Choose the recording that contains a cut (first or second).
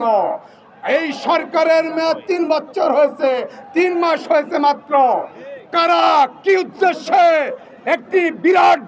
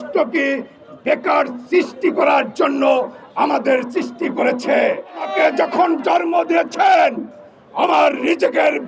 second